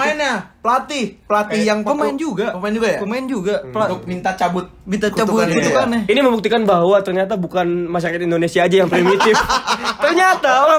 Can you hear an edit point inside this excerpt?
no; 0 cuts

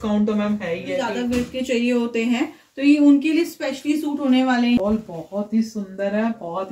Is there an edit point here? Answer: yes; 2 cuts; at 1.1 s, 4.8 s

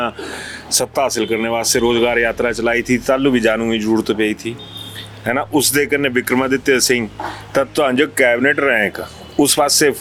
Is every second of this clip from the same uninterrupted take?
yes; 0 cuts

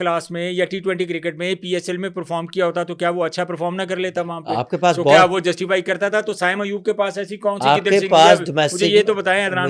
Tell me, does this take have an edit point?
no; 0 cuts

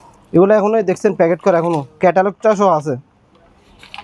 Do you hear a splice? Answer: no; 0 cuts

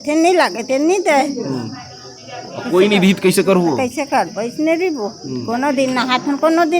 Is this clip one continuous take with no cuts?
yes; 0 cuts

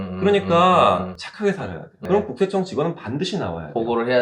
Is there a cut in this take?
yes; 1 cut; at 2.0 s

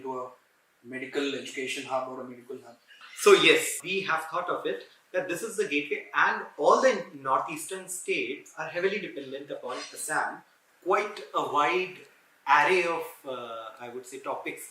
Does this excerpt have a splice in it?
yes; 1 cut; at 10.5 s

